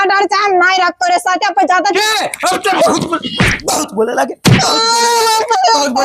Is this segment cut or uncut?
uncut